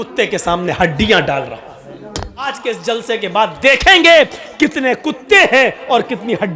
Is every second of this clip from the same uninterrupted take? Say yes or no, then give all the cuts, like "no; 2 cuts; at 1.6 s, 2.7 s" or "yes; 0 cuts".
no; 1 cut; at 2.5 s